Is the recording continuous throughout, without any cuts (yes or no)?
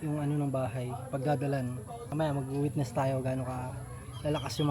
no